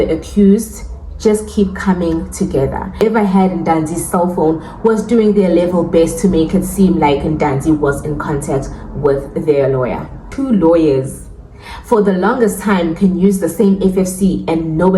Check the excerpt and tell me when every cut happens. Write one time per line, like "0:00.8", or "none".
0:03.0
0:10.2